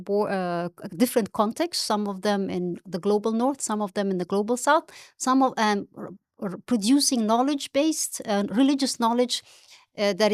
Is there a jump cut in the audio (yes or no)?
no